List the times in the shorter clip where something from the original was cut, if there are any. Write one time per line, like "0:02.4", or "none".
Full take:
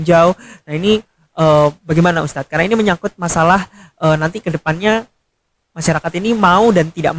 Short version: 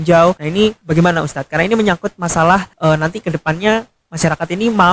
0:00.8
0:02.7
0:04.0